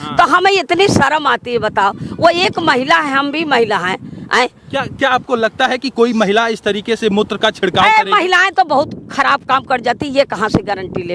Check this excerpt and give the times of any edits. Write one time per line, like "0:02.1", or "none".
none